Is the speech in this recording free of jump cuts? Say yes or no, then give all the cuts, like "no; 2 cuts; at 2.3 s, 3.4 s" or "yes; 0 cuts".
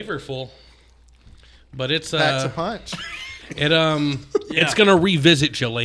yes; 0 cuts